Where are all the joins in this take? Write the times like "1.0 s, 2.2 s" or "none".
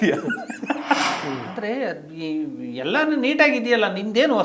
1.1 s